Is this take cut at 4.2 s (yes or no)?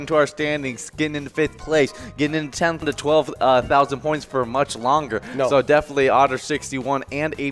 no